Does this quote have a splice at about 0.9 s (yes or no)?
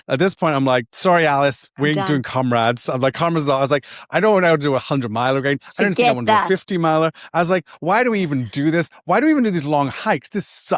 yes